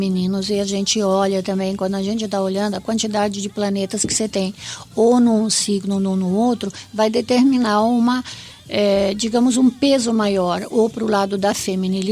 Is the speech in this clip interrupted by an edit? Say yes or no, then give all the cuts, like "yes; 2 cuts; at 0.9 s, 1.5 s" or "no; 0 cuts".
no; 0 cuts